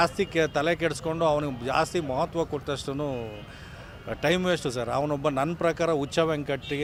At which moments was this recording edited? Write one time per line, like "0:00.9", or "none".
none